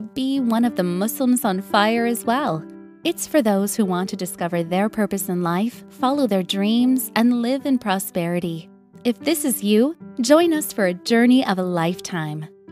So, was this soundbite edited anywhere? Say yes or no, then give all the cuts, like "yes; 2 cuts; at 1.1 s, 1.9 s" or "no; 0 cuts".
no; 0 cuts